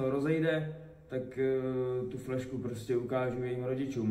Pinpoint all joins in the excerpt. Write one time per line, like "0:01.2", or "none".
none